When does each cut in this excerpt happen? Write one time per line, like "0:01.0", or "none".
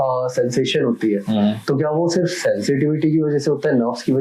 none